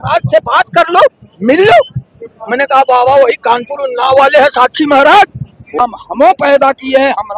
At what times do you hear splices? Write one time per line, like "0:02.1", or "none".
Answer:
0:05.8

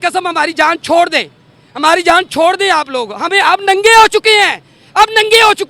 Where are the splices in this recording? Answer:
none

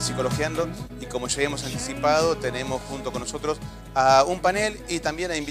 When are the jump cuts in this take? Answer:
none

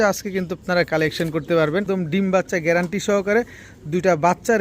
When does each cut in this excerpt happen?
0:01.9

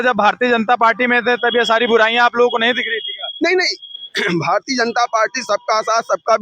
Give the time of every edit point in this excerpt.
none

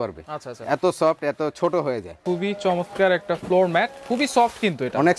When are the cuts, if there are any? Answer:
0:02.2

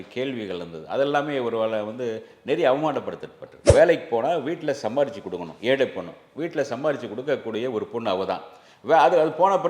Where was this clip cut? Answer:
0:03.5

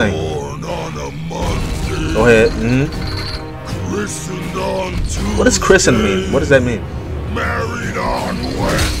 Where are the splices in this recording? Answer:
none

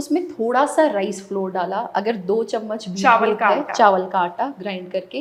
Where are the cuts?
none

